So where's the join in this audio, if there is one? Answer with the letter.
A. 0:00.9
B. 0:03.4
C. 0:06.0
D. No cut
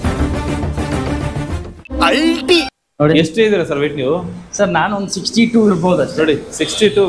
D